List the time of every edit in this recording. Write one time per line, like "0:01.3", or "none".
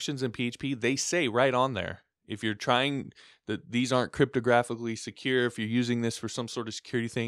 none